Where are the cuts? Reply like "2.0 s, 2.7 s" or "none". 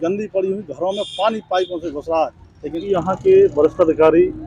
2.8 s